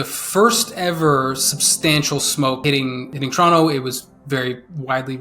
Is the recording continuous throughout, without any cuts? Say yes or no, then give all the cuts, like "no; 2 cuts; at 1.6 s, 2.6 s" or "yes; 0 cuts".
no; 1 cut; at 2.6 s